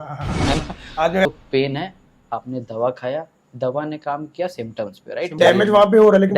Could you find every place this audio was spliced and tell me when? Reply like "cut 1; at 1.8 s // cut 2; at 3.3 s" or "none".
cut 1; at 1.3 s // cut 2; at 5.4 s